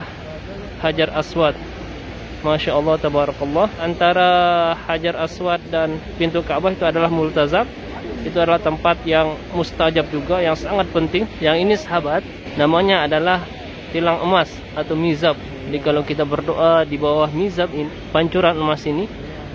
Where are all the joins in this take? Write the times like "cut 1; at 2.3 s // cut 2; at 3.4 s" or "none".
cut 1; at 3.8 s // cut 2; at 11.3 s // cut 3; at 12.4 s // cut 4; at 15.5 s // cut 5; at 17.8 s